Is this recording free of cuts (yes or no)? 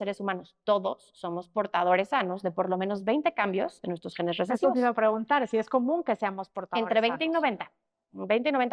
yes